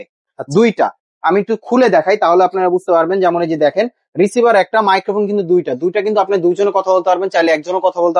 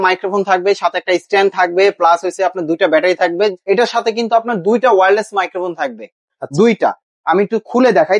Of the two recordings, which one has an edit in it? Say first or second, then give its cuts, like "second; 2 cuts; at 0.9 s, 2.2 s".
second; 1 cut; at 3.6 s